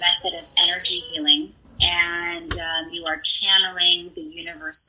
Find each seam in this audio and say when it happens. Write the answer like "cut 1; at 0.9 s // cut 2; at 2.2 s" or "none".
cut 1; at 1.6 s